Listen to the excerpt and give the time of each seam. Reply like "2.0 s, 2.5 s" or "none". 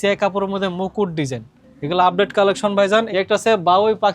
3.1 s